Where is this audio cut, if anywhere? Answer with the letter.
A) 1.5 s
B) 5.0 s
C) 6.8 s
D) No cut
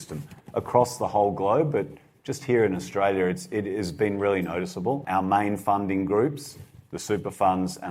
B